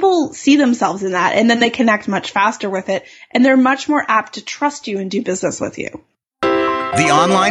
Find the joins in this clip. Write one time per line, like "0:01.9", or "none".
0:06.2